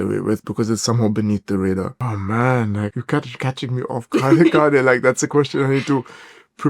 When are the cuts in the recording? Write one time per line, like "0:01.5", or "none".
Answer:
0:02.0
0:03.0